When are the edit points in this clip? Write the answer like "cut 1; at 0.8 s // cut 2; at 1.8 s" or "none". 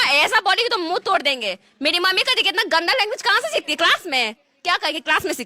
none